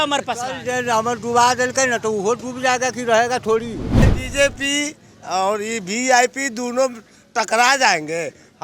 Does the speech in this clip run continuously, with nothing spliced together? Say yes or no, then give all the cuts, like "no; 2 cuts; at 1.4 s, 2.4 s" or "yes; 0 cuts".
no; 1 cut; at 3.9 s